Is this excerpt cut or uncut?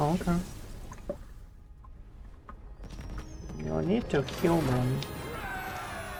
uncut